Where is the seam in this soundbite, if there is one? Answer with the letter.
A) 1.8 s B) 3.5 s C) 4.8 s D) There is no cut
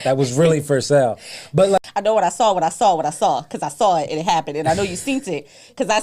A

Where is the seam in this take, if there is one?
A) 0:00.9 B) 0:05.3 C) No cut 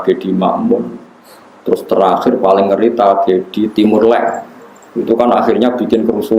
C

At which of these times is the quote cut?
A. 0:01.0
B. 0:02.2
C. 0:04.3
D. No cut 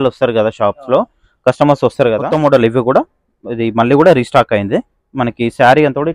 B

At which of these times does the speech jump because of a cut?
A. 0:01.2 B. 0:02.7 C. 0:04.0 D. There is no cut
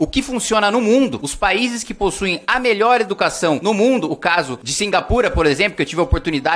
D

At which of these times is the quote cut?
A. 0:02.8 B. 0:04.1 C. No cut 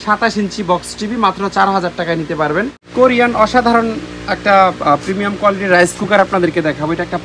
A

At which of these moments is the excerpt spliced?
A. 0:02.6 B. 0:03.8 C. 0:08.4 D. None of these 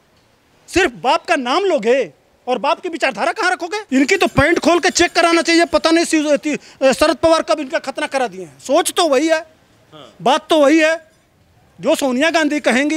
B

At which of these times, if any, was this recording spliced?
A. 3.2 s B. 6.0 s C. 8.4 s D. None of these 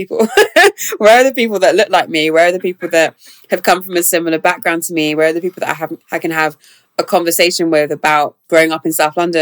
C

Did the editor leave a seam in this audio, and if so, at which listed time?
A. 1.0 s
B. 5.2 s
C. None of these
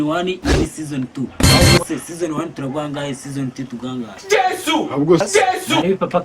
B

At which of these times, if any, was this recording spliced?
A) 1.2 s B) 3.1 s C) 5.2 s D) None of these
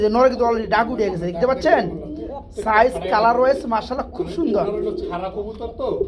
D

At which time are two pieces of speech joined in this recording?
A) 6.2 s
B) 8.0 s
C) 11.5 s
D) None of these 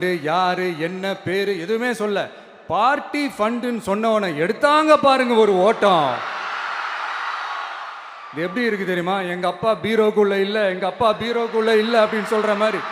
B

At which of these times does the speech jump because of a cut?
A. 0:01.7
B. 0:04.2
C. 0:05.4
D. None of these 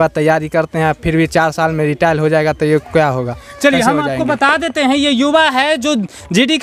D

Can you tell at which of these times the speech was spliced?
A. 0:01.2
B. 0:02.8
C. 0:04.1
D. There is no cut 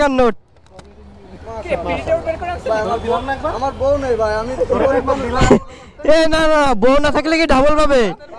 D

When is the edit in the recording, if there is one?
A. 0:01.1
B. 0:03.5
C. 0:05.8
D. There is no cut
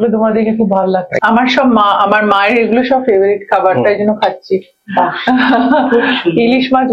A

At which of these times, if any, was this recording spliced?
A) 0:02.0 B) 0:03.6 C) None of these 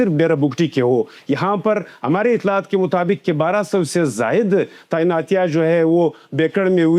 C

